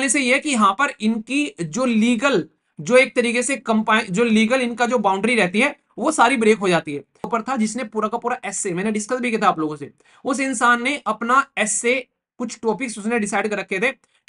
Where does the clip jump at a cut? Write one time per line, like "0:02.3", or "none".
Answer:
0:07.3

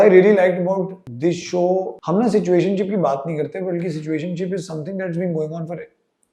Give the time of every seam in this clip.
0:01.0
0:02.0

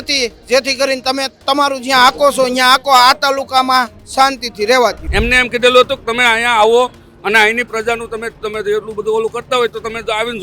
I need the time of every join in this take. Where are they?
0:05.0

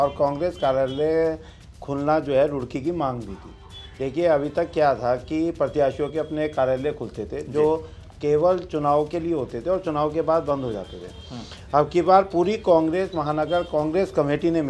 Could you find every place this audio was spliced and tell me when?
none

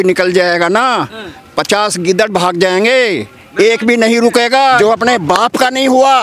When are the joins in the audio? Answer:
0:04.8

